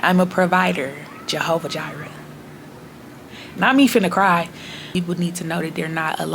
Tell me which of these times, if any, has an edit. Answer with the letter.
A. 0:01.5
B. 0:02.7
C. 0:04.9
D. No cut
C